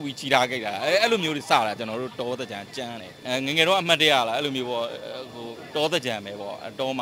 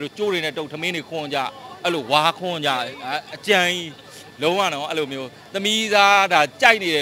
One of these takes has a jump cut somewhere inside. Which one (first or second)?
first